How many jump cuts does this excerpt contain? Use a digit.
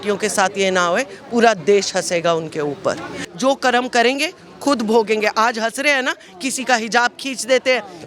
1